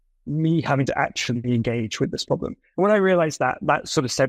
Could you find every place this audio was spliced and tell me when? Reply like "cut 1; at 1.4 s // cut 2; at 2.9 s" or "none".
none